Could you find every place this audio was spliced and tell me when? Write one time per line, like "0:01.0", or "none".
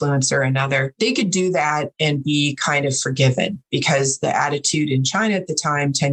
0:00.9